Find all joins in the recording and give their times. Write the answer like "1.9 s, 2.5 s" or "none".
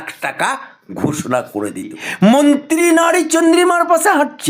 2.0 s